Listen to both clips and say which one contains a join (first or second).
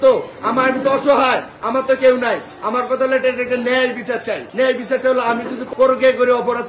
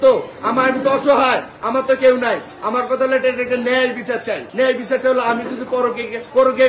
first